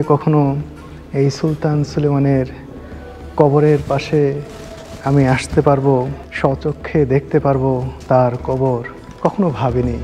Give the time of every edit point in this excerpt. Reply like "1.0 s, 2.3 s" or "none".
6.2 s, 7.9 s, 9.0 s